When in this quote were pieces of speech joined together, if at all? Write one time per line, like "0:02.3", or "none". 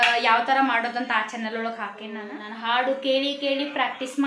0:02.3